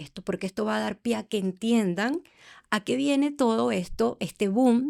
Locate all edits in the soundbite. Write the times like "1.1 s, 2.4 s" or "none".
none